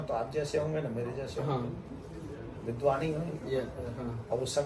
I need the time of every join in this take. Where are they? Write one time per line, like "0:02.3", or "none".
none